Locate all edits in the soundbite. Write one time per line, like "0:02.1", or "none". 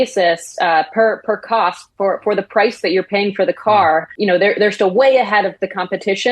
0:04.1